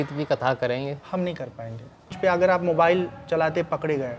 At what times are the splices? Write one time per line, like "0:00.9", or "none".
0:02.1